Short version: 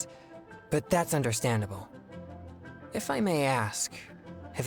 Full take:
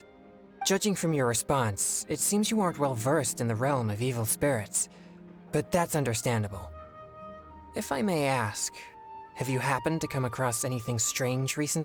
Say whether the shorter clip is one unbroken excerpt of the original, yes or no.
yes